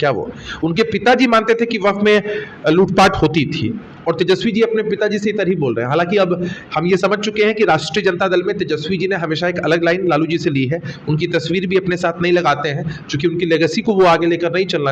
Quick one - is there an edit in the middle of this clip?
no; 0 cuts

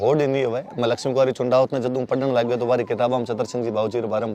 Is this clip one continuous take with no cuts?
yes; 0 cuts

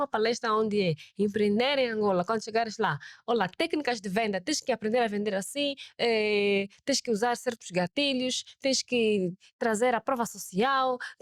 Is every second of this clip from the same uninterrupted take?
yes; 0 cuts

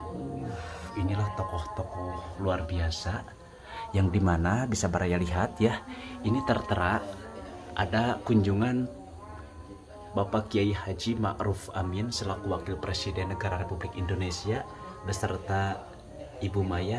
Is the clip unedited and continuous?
yes; 0 cuts

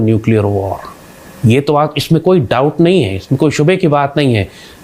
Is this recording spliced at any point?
no; 0 cuts

